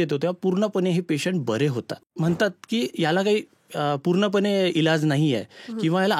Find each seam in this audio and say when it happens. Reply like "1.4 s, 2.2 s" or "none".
2.1 s